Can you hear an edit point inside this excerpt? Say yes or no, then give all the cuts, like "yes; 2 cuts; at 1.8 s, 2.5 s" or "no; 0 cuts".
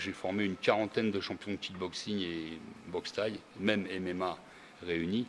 no; 0 cuts